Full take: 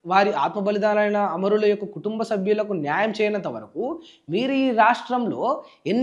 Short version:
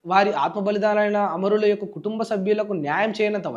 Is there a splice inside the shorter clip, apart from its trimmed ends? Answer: no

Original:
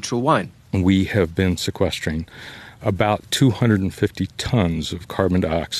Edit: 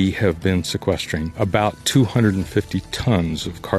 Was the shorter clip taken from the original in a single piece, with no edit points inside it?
no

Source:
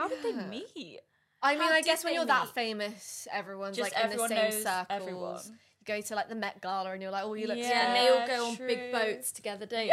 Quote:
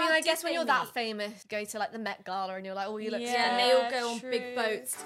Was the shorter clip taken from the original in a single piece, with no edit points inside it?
no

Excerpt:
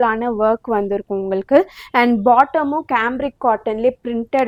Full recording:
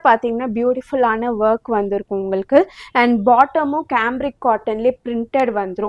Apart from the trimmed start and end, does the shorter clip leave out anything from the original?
no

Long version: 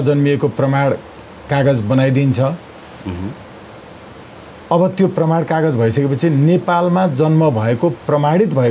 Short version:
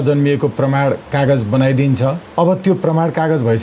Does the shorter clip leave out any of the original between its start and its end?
yes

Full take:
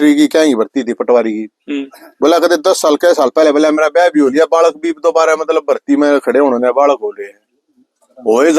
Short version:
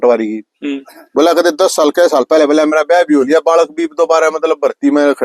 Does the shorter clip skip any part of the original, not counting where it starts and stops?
no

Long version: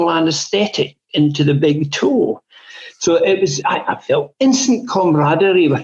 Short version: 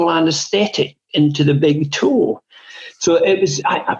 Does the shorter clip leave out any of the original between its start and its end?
no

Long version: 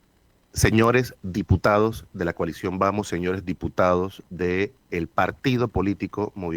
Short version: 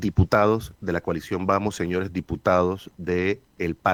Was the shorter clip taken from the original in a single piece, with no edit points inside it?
yes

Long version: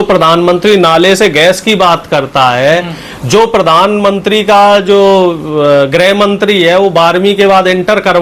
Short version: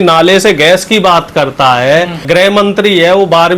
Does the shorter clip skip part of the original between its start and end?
yes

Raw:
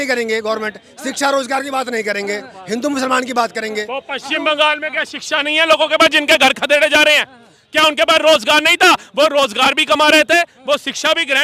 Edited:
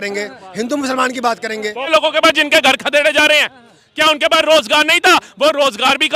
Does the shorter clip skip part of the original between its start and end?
yes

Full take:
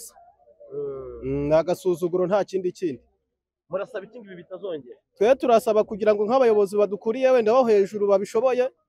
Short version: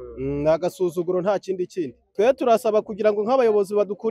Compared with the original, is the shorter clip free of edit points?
no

